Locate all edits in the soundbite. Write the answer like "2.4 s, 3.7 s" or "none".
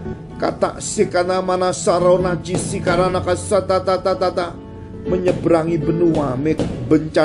none